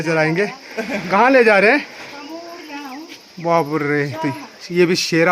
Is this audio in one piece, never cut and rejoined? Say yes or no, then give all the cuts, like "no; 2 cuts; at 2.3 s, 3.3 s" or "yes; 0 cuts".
yes; 0 cuts